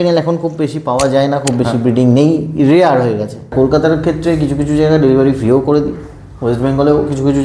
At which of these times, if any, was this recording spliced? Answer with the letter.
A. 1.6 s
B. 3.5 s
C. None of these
B